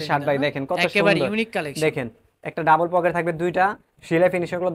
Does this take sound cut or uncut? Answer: uncut